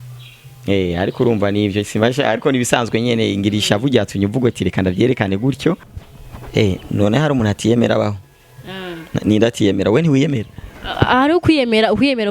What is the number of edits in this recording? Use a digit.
1